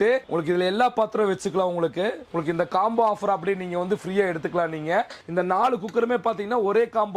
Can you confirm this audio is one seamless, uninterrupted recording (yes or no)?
no